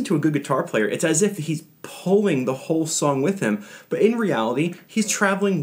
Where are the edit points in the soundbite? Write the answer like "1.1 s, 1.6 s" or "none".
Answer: none